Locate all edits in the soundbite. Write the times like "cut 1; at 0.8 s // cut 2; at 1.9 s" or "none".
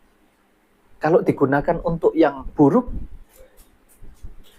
cut 1; at 2.4 s

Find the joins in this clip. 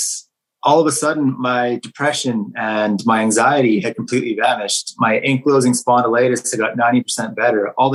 none

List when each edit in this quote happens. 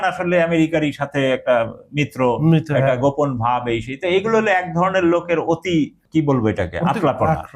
cut 1; at 6.0 s

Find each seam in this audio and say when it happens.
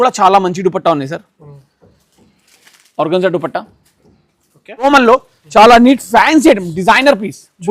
cut 1; at 4.8 s

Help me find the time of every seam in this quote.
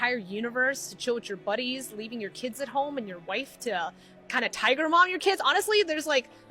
cut 1; at 2.3 s // cut 2; at 3.2 s // cut 3; at 5.4 s

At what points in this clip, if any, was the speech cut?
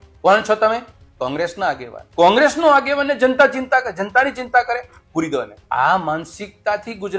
cut 1; at 1.9 s // cut 2; at 5.6 s

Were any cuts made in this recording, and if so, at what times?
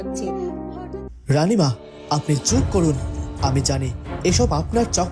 cut 1; at 1.0 s

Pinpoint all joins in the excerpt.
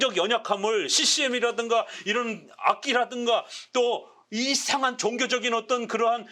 none

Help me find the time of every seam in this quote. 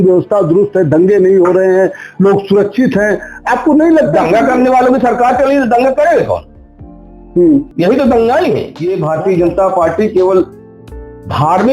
cut 1; at 8.7 s

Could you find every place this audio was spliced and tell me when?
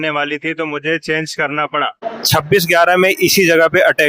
cut 1; at 2.0 s

